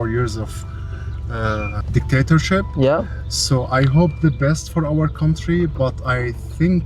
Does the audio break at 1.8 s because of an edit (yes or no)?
yes